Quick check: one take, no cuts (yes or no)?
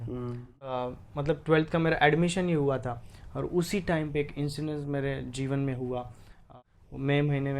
no